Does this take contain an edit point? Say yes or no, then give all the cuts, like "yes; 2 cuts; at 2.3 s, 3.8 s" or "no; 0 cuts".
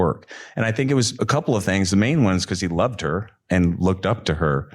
yes; 1 cut; at 1.1 s